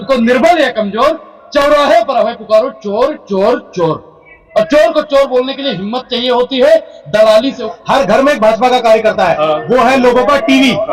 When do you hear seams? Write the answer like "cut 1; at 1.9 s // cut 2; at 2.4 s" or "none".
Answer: cut 1; at 7.7 s

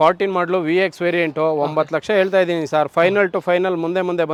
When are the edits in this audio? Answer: none

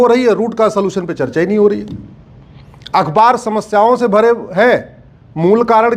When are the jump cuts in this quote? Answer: none

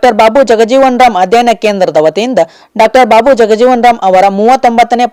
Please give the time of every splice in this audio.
none

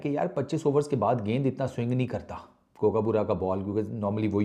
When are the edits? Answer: none

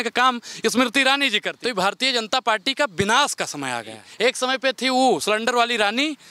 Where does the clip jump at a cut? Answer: cut 1; at 1.5 s // cut 2; at 4.0 s

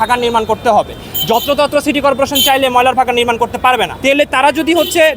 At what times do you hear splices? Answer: none

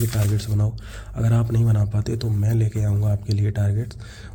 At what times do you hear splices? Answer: none

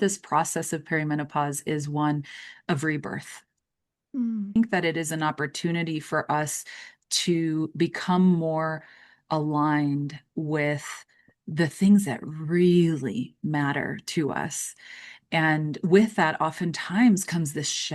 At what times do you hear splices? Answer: cut 1; at 4.6 s

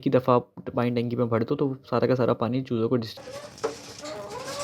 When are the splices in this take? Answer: cut 1; at 3.1 s

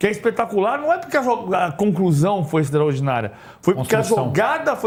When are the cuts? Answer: none

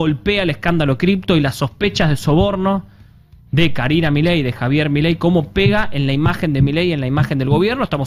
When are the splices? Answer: none

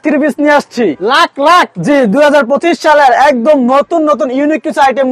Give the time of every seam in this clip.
none

